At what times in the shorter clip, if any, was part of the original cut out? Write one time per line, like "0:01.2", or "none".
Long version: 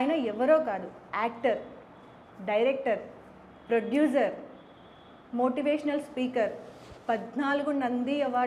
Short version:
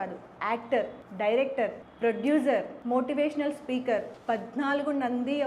0:01.0
0:01.8
0:02.7
0:04.1